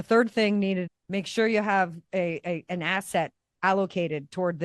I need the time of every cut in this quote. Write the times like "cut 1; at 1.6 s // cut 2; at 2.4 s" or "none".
cut 1; at 0.9 s